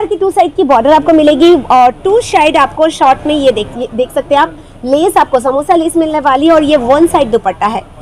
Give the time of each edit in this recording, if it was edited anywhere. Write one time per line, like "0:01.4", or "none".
none

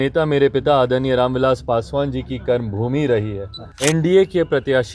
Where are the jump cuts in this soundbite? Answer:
0:03.7

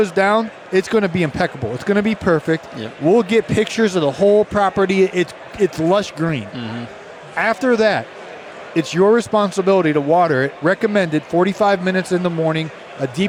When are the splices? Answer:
none

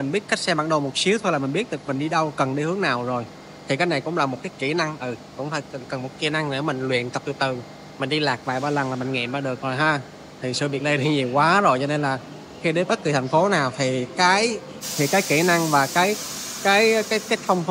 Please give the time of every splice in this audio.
none

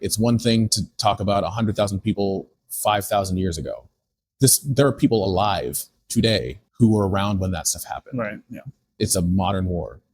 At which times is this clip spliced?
0:06.6

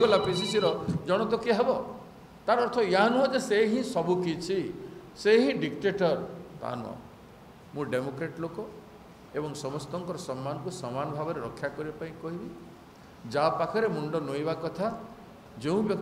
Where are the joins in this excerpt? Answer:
none

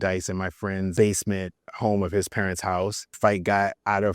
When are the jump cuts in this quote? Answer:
0:00.9
0:03.2

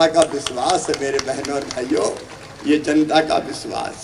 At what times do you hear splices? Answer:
none

